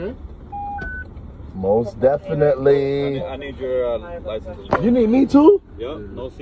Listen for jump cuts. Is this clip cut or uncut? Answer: uncut